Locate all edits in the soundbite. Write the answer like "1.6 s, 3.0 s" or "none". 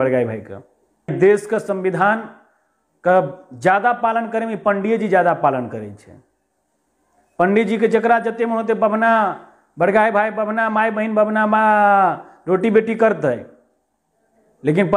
1.1 s